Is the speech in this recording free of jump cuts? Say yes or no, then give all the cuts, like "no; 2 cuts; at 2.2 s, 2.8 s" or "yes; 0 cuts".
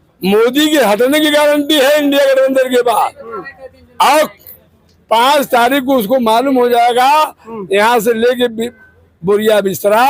yes; 0 cuts